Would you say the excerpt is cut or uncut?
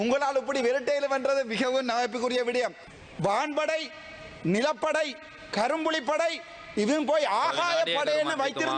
cut